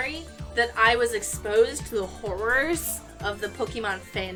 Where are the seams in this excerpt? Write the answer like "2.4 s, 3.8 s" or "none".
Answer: none